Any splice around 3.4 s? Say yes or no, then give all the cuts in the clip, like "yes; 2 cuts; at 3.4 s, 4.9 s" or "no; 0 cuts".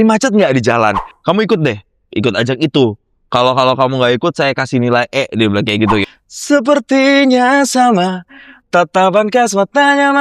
no; 2 cuts; at 1.1 s, 6.0 s